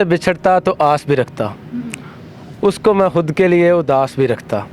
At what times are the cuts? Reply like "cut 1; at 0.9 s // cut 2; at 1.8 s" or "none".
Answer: none